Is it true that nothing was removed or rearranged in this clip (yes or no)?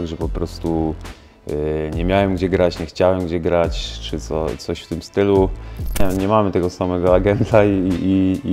no